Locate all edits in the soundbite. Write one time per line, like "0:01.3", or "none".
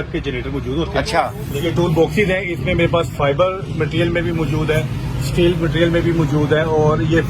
0:01.4